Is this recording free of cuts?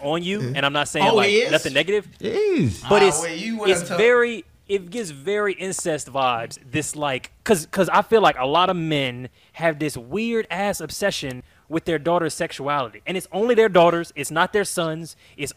yes; 0 cuts

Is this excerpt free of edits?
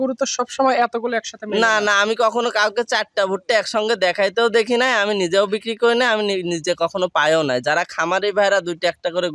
yes; 0 cuts

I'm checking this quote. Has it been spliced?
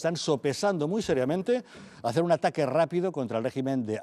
no; 0 cuts

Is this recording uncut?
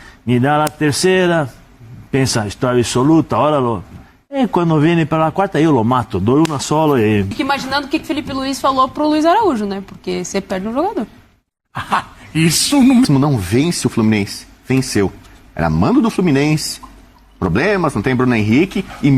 no; 2 cuts; at 7.3 s, 13.1 s

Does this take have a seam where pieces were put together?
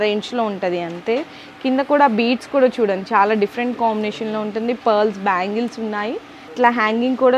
yes; 1 cut; at 6.4 s

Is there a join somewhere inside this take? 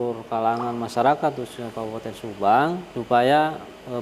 yes; 1 cut; at 2.9 s

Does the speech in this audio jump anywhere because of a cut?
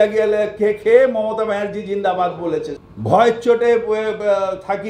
yes; 1 cut; at 2.9 s

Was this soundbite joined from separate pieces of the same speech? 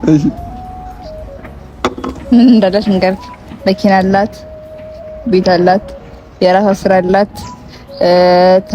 no; 0 cuts

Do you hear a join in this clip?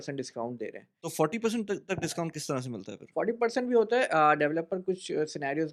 no; 0 cuts

